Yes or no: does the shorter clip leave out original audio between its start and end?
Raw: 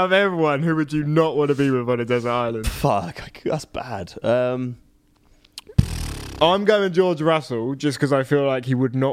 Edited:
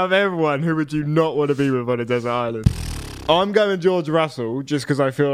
yes